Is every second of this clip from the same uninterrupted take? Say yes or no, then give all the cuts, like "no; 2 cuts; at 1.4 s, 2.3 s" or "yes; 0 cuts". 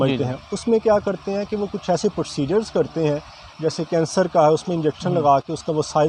yes; 0 cuts